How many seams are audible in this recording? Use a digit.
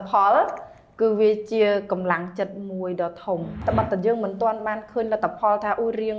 1